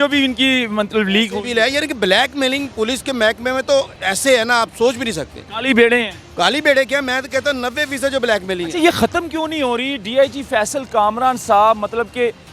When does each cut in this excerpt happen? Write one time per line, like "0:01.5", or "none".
none